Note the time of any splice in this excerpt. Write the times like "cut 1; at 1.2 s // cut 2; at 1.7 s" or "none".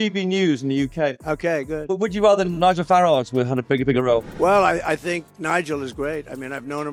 none